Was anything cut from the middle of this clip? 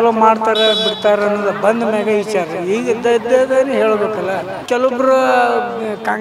yes; 1 cut; at 4.6 s

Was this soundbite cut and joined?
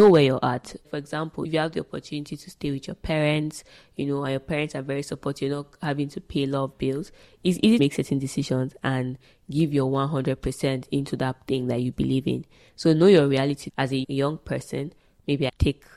no; 0 cuts

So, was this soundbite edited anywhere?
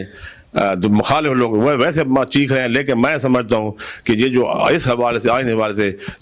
no; 0 cuts

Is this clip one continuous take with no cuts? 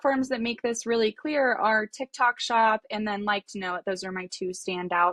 yes; 0 cuts

